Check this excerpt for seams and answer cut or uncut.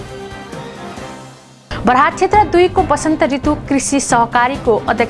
uncut